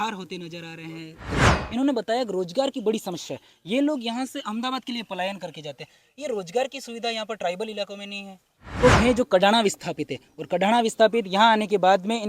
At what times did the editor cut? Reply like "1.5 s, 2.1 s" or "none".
1.3 s, 8.8 s